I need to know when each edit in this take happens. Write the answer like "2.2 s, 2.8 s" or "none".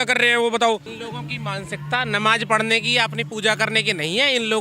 1.0 s